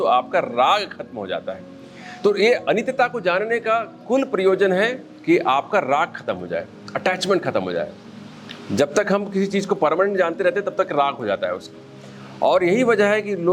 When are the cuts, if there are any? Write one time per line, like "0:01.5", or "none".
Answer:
none